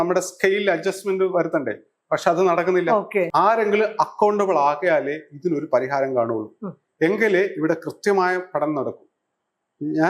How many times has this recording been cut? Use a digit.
1